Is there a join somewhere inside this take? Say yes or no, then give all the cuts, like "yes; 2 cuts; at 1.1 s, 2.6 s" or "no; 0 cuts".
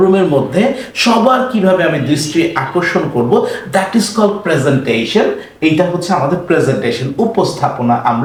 no; 0 cuts